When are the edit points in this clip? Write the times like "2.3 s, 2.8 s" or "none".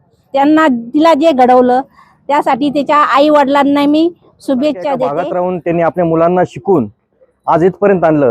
5.2 s